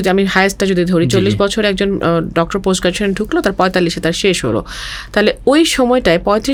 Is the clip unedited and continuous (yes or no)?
yes